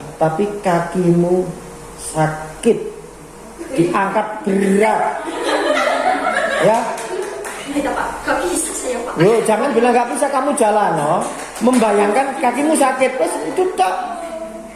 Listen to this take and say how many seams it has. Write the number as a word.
one